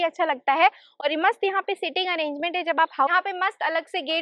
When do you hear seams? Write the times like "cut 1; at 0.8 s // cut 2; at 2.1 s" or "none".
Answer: cut 1; at 3.1 s